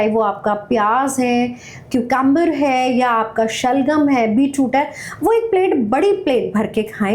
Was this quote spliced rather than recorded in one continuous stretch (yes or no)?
no